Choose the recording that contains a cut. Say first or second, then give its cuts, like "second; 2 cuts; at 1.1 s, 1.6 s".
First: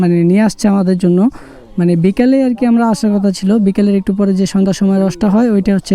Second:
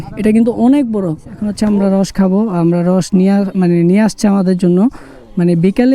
second; 1 cut; at 1.4 s